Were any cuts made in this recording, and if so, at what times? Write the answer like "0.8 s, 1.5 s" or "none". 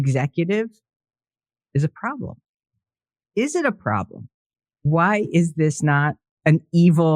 4.8 s, 6.2 s